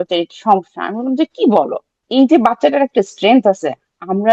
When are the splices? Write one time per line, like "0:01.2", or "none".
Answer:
0:02.0

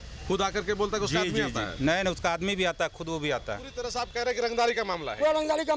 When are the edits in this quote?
0:03.8

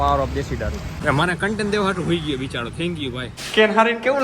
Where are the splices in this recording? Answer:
0:00.9
0:03.4

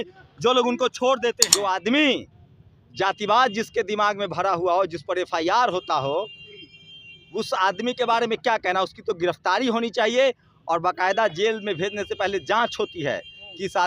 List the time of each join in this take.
0:01.5

